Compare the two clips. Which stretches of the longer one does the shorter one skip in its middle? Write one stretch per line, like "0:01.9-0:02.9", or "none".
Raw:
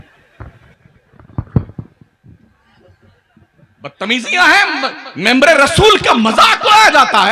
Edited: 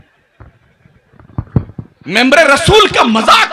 0:01.9-0:05.0